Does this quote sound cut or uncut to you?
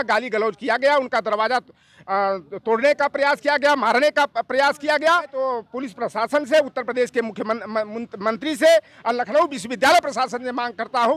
cut